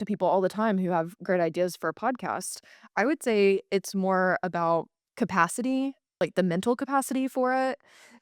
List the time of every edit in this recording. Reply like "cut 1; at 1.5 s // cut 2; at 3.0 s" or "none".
cut 1; at 5.0 s // cut 2; at 6.0 s